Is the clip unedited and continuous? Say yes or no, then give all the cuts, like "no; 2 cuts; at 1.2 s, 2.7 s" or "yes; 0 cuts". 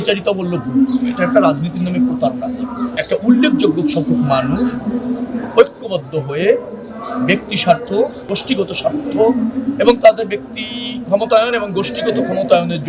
no; 2 cuts; at 2.9 s, 8.3 s